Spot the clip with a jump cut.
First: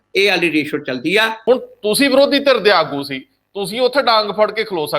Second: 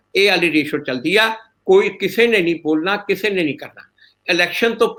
first; 1 cut; at 1.3 s

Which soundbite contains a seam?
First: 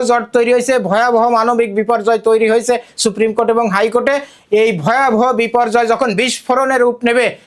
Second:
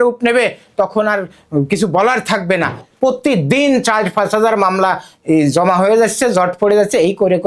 second; 1 cut; at 2.8 s

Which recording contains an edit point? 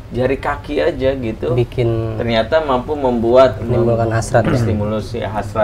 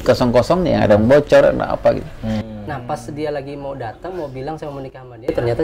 second; 1 cut; at 2.5 s

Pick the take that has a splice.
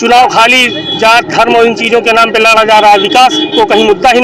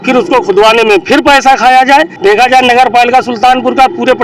second; 1 cut; at 2.1 s

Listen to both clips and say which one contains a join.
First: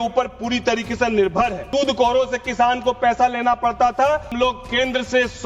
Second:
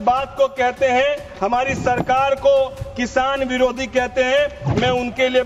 first; 2 cuts; at 1.6 s, 4.3 s

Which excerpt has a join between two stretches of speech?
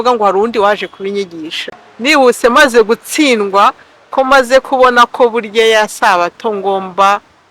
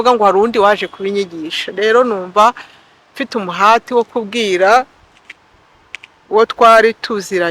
first; 1 cut; at 1.6 s

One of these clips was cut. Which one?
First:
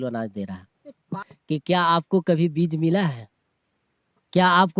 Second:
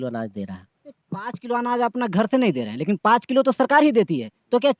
first; 1 cut; at 1.2 s

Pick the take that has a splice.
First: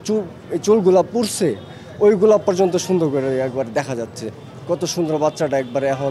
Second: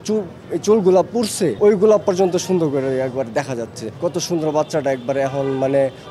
second; 2 cuts; at 1.5 s, 3.8 s

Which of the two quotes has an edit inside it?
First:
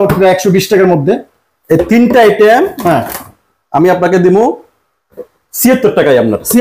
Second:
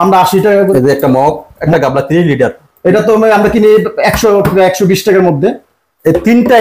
second; 2 cuts; at 0.7 s, 1.6 s

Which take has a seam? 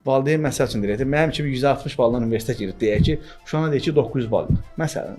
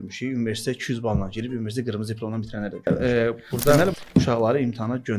second; 1 cut; at 2.9 s

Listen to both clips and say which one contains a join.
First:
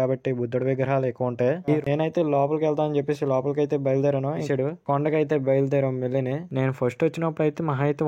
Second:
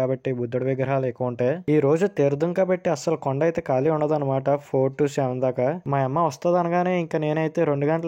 first; 2 cuts; at 1.8 s, 4.4 s

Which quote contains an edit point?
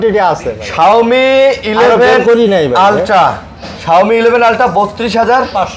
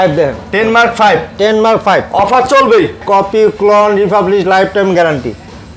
second; 1 cut; at 3.0 s

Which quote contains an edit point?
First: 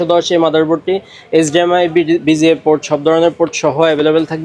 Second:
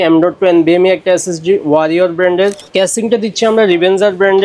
second; 1 cut; at 2.6 s

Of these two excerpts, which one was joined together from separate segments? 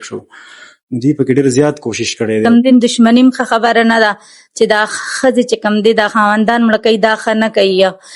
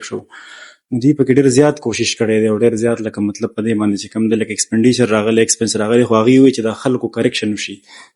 first; 1 cut; at 2.4 s

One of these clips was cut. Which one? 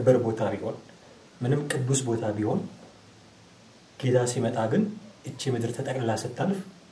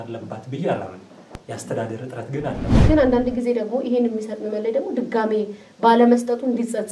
second; 1 cut; at 2.7 s

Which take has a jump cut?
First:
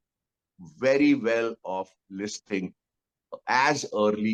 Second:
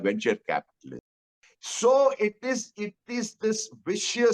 second; 1 cut; at 1.0 s

